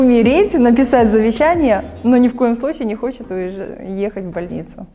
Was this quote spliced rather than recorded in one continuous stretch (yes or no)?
no